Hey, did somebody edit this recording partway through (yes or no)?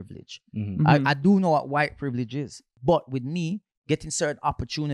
yes